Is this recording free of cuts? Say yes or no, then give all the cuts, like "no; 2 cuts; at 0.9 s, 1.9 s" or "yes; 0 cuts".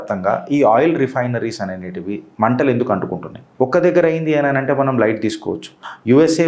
no; 2 cuts; at 2.2 s, 3.4 s